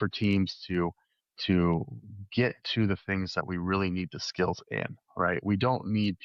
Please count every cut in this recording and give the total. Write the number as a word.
zero